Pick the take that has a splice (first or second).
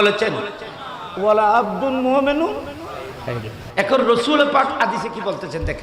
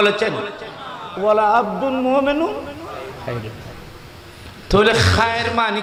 first